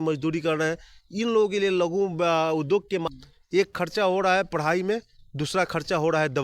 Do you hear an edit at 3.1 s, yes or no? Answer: yes